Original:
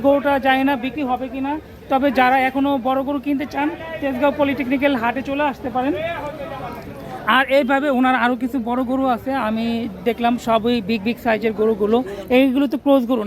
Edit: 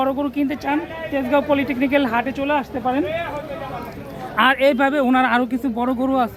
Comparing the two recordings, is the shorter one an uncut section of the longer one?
yes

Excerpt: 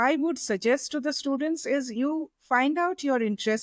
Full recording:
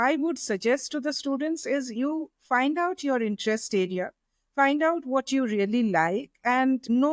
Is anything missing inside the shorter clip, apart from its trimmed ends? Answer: no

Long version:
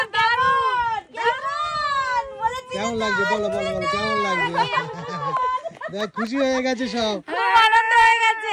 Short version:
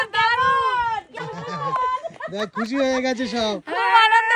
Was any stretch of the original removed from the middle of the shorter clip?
yes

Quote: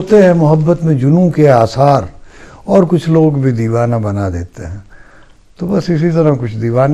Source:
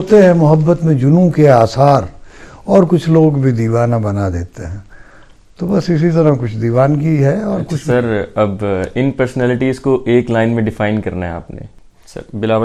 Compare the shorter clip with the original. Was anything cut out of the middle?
no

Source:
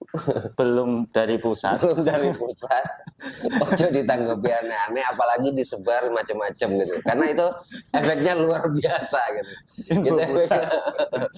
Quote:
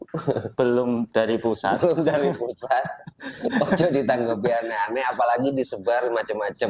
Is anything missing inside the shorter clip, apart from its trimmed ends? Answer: no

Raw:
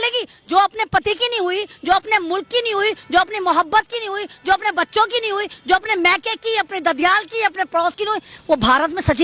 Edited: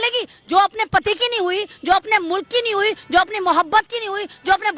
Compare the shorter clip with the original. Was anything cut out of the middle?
no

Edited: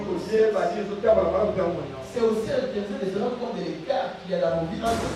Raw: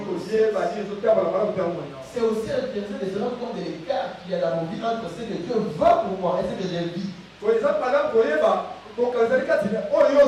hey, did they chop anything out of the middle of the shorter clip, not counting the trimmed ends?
no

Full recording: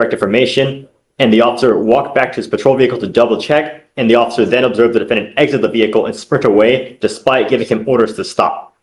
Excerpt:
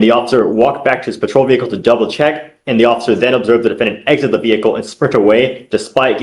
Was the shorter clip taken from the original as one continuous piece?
yes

